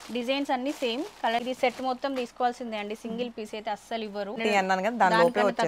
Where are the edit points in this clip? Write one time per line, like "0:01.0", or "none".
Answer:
0:01.4
0:04.4